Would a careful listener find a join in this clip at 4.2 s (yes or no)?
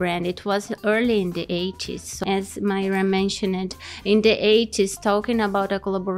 no